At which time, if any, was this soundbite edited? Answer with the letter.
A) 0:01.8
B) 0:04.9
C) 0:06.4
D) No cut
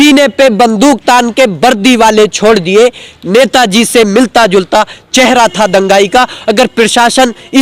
D